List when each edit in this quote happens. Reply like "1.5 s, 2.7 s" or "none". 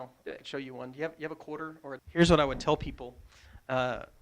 2.0 s